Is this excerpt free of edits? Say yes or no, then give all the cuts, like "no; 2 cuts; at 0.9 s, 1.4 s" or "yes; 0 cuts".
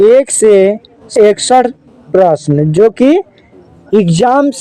no; 1 cut; at 1.0 s